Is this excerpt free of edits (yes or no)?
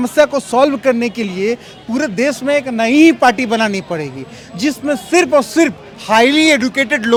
yes